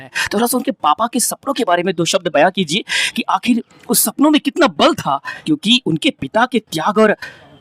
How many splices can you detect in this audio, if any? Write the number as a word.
one